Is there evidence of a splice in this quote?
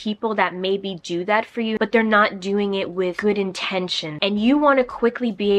yes; 2 cuts; at 1.8 s, 4.0 s

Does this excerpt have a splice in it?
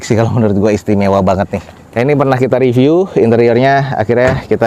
no; 0 cuts

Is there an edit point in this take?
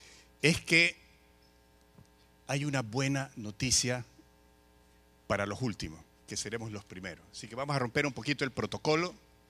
yes; 1 cut; at 5.3 s

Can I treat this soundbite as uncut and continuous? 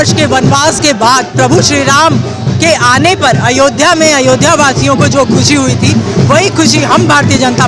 yes; 0 cuts

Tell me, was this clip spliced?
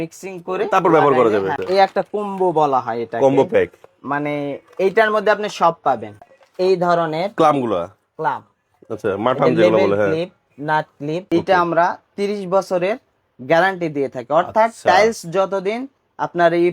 yes; 3 cuts; at 1.6 s, 6.1 s, 11.2 s

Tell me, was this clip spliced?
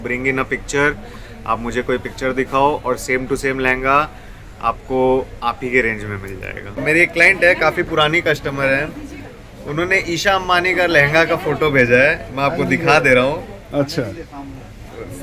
yes; 1 cut; at 6.8 s

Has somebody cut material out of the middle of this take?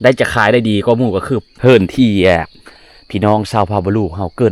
yes; 1 cut; at 1.5 s

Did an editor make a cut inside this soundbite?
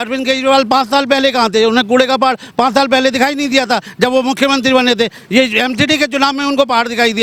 no; 0 cuts

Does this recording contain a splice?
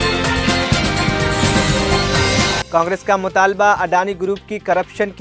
yes; 1 cut; at 2.6 s

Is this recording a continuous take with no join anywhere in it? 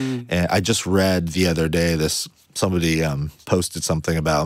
no; 1 cut; at 2.3 s

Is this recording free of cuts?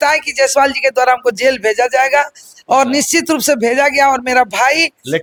yes; 0 cuts

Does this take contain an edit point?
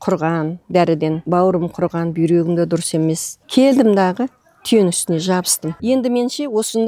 yes; 3 cuts; at 1.2 s, 3.3 s, 5.7 s

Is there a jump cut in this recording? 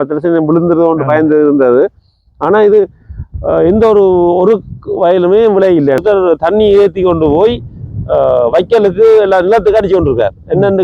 yes; 1 cut; at 6.0 s

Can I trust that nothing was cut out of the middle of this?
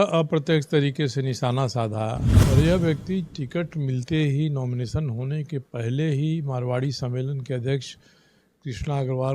no; 1 cut; at 2.3 s

